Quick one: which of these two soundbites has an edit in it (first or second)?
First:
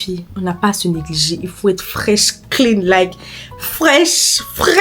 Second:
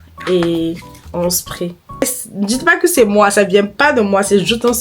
second